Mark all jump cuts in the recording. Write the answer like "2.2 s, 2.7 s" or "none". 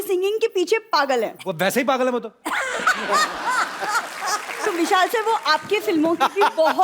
1.4 s, 4.7 s